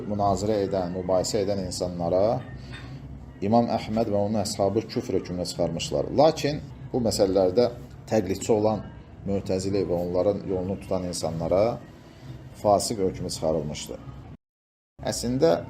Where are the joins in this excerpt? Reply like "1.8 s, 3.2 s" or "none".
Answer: 14.5 s